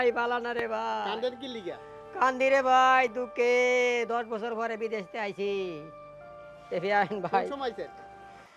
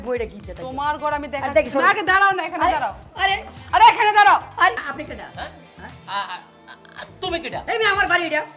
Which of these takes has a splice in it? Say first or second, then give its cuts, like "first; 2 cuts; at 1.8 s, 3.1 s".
second; 1 cut; at 4.9 s